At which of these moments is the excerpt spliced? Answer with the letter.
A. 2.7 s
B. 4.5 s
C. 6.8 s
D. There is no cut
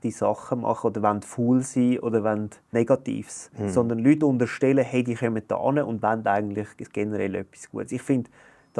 A